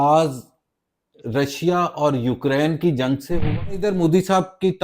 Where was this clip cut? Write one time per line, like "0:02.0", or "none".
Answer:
0:03.8